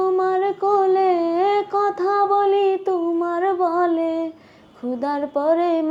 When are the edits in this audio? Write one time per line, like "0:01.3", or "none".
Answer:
none